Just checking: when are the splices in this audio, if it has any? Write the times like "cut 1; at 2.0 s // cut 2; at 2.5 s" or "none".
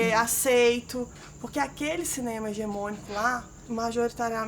cut 1; at 1.2 s // cut 2; at 3.7 s